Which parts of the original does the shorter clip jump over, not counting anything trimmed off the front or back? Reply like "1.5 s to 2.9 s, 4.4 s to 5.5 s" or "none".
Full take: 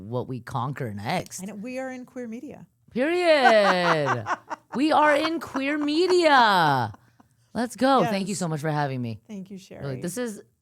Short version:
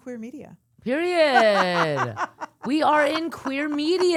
none